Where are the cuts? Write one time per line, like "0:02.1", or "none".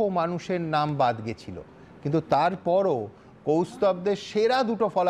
none